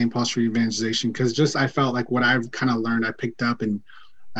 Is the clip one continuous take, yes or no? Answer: yes